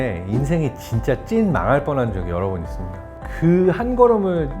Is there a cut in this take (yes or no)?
yes